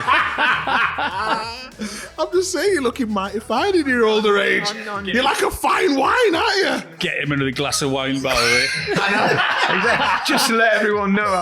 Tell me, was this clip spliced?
yes; 1 cut; at 7.1 s

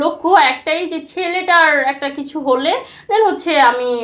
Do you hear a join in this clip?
no; 0 cuts

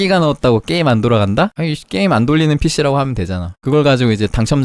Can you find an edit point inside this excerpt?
yes; 2 cuts; at 1.7 s, 3.6 s

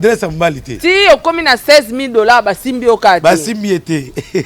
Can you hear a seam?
no; 0 cuts

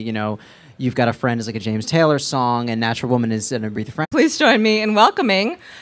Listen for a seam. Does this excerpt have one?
no; 0 cuts

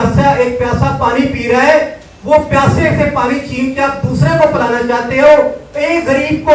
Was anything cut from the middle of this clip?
no; 0 cuts

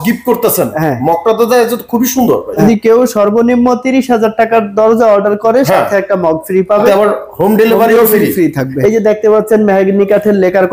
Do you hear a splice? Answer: yes; 3 cuts; at 2.6 s, 6.9 s, 8.7 s

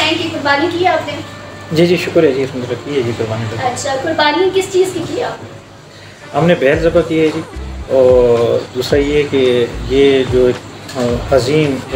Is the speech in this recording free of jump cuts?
yes; 0 cuts

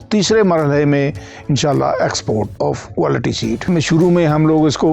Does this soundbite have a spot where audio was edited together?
yes; 1 cut; at 3.6 s

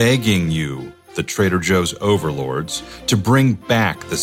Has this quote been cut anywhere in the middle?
no; 0 cuts

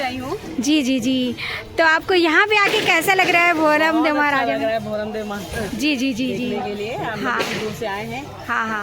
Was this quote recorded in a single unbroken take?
yes; 0 cuts

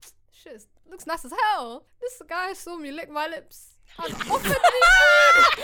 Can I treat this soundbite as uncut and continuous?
no; 1 cut; at 1.8 s

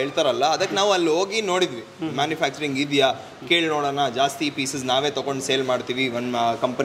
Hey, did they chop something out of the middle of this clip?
no; 0 cuts

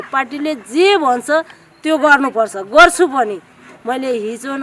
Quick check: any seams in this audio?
no; 0 cuts

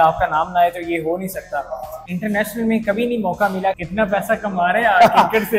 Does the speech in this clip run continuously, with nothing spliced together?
no; 2 cuts; at 2.0 s, 3.8 s

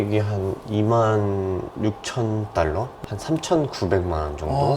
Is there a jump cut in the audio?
yes; 1 cut; at 2.9 s

